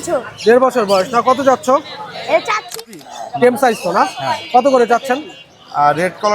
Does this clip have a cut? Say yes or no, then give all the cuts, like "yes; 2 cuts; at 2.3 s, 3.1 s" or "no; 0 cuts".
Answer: yes; 1 cut; at 2.8 s